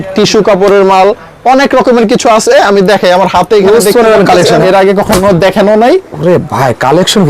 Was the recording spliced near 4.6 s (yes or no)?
yes